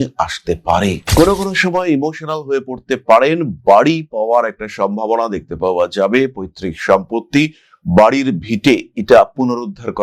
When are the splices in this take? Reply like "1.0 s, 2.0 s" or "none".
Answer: 1.1 s